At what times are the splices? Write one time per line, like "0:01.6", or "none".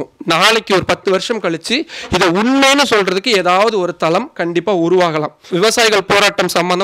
0:05.4